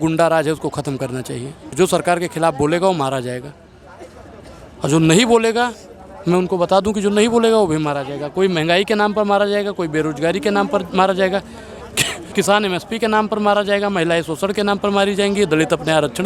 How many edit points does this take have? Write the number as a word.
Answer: one